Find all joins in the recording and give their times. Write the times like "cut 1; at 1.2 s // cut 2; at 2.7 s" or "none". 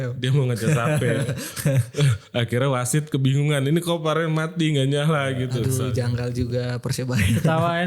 cut 1; at 5.6 s